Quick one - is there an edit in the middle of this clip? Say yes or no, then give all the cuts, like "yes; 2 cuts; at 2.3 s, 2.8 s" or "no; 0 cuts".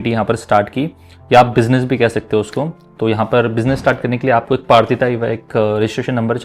no; 0 cuts